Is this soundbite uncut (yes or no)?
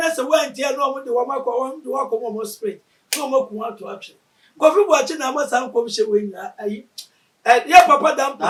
yes